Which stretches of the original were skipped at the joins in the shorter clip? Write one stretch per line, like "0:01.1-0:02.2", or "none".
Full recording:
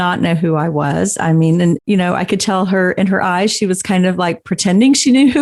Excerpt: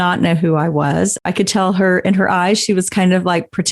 0:01.2-0:02.1